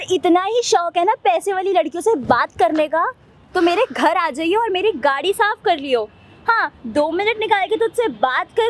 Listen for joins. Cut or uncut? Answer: uncut